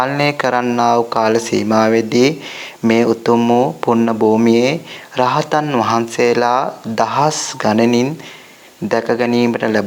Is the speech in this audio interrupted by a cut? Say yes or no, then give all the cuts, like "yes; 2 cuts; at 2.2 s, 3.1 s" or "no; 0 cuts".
no; 0 cuts